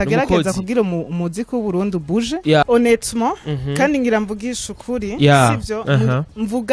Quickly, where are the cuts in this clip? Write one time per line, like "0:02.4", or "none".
0:02.6